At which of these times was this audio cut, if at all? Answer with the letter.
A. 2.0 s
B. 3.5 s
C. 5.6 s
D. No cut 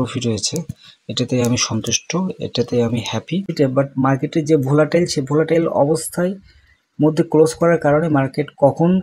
B